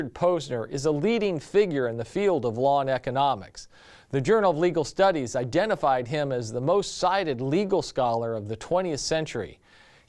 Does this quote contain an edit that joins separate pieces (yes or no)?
yes